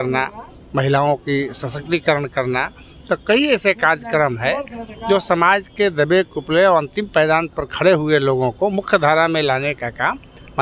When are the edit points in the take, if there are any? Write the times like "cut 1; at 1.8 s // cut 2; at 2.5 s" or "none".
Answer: none